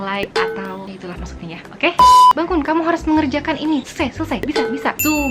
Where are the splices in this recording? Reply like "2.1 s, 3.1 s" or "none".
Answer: 2.3 s